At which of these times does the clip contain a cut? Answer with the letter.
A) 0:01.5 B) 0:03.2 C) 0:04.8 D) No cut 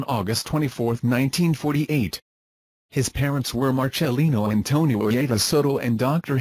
A